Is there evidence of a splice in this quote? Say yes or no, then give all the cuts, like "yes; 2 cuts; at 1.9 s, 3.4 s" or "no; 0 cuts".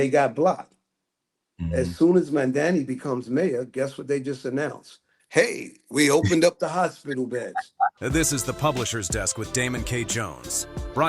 yes; 1 cut; at 8.0 s